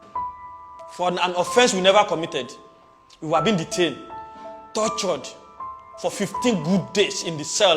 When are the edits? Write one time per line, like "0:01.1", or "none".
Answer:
0:01.0